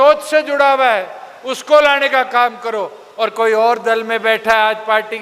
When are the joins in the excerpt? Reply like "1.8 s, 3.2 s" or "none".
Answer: none